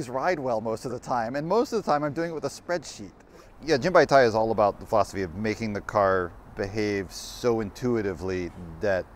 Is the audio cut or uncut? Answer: cut